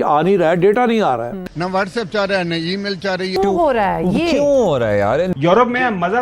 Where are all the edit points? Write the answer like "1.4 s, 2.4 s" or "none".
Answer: 1.5 s, 3.4 s, 5.3 s